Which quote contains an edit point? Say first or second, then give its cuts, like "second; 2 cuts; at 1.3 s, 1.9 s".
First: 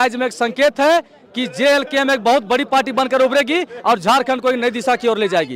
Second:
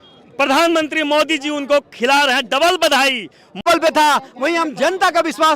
second; 1 cut; at 3.6 s